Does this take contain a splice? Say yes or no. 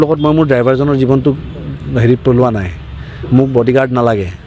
no